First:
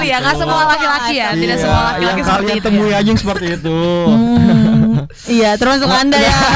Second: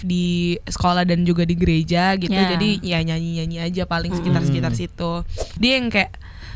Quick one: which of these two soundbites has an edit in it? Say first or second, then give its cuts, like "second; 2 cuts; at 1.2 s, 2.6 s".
second; 1 cut; at 5.5 s